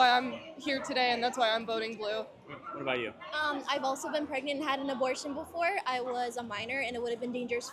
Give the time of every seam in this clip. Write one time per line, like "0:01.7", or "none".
none